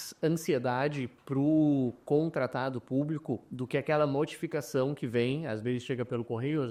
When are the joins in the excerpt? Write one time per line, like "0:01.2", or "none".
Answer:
none